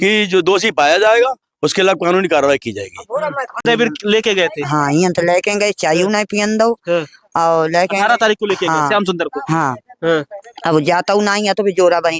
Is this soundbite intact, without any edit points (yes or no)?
no